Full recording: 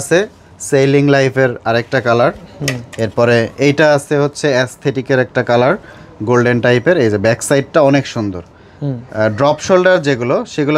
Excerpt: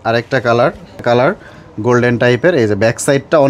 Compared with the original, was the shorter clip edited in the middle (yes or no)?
yes